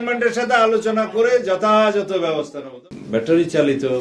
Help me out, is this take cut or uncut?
cut